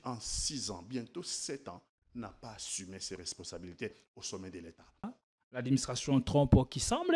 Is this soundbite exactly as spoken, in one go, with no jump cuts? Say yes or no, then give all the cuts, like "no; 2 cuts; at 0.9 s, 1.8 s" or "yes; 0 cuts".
no; 1 cut; at 5.1 s